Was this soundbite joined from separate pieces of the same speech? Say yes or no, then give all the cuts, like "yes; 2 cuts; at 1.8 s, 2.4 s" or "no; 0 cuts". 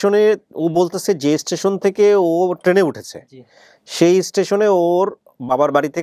no; 0 cuts